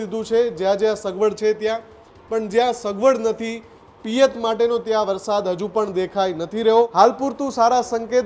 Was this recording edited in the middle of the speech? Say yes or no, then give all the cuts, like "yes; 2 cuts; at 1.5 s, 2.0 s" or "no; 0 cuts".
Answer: yes; 1 cut; at 6.9 s